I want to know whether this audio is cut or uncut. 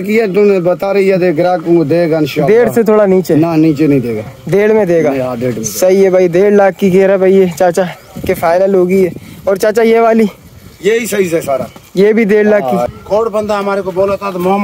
cut